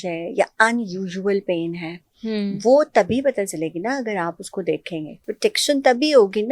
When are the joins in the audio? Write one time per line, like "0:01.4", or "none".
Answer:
0:05.2

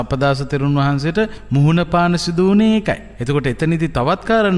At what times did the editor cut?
0:01.4
0:03.1

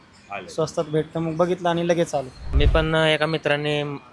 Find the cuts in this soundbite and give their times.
0:02.5

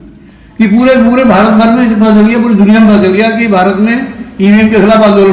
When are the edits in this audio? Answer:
none

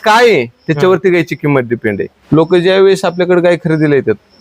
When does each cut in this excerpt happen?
0:02.1

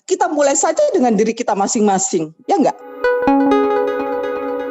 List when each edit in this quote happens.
0:02.9

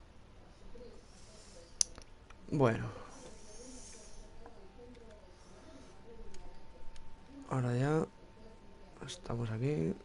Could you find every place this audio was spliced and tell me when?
0:02.7

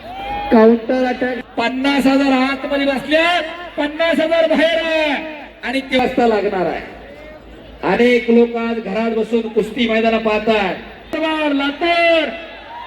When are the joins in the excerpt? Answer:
0:01.4
0:06.0
0:11.1

